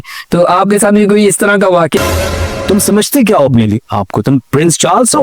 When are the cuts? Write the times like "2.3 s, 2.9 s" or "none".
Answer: 2.0 s